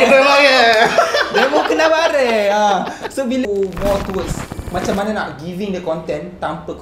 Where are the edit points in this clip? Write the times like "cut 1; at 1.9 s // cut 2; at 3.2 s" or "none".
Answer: cut 1; at 3.4 s